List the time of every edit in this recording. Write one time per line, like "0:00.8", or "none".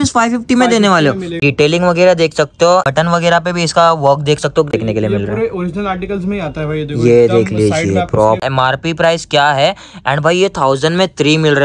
0:01.4
0:02.9
0:04.7
0:08.5